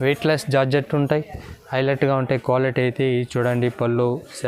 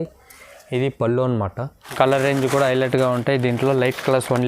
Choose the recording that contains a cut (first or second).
second